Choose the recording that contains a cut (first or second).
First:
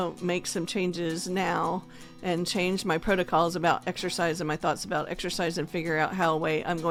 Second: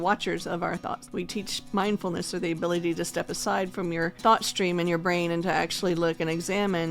second